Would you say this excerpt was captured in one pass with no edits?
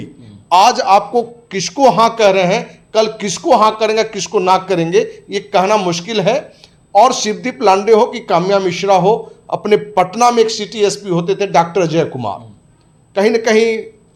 yes; 0 cuts

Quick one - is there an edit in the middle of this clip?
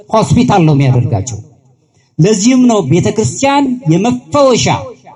no; 0 cuts

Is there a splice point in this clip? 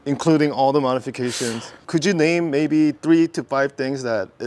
yes; 1 cut; at 1.7 s

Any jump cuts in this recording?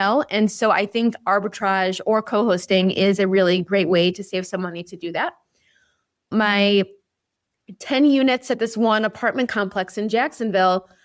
yes; 1 cut; at 6.3 s

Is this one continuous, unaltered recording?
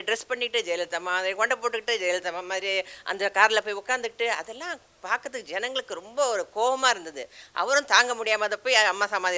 yes; 0 cuts

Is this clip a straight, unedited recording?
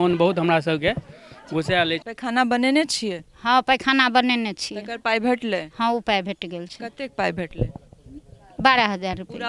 no; 1 cut; at 2.1 s

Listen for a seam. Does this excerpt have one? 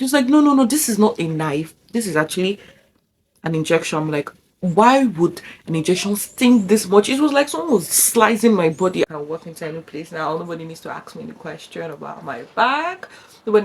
yes; 1 cut; at 9.1 s

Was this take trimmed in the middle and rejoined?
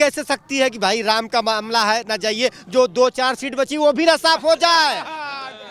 no; 0 cuts

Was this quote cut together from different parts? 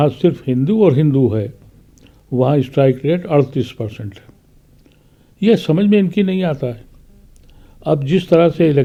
no; 0 cuts

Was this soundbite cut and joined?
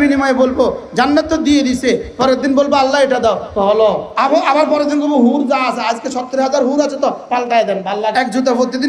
yes; 2 cuts; at 4.1 s, 8.1 s

